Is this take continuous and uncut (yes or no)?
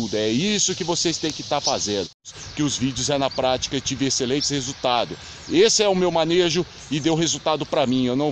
no